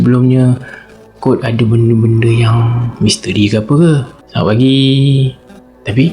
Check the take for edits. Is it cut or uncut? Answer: cut